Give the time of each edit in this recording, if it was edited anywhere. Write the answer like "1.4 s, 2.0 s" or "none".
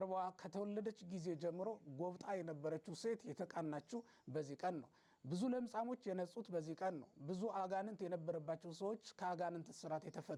none